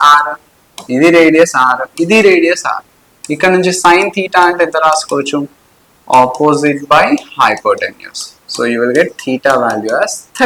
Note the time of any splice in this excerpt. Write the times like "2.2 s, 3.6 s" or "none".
none